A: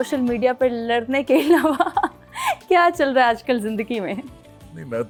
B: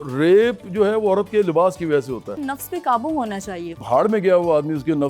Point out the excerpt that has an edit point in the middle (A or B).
B